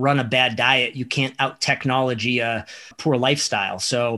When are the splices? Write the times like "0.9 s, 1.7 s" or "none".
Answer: 2.9 s